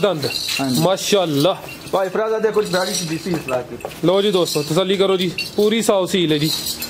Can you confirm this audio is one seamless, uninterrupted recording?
yes; 0 cuts

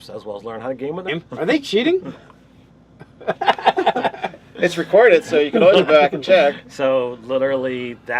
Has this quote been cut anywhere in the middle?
no; 0 cuts

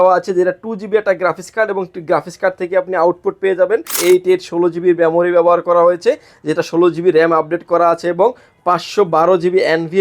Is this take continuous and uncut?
no; 1 cut; at 3.9 s

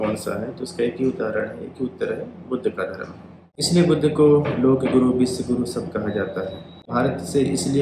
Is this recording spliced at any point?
yes; 2 cuts; at 3.6 s, 6.9 s

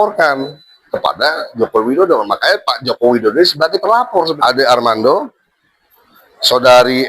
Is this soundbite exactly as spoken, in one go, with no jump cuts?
no; 1 cut; at 4.3 s

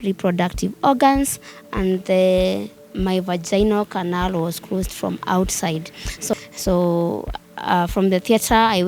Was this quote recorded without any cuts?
no; 1 cut; at 6.3 s

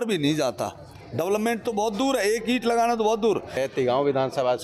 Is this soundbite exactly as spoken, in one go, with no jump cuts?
no; 1 cut; at 3.5 s

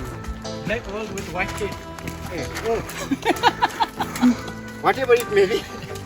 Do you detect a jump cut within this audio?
no; 0 cuts

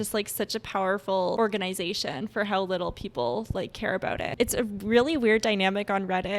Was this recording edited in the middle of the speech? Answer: yes; 2 cuts; at 1.4 s, 4.3 s

